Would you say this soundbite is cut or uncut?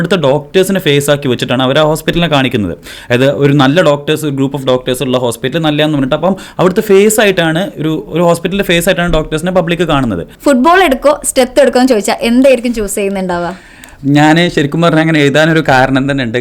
cut